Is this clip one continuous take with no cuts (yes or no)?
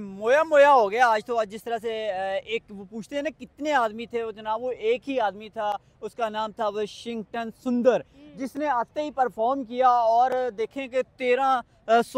yes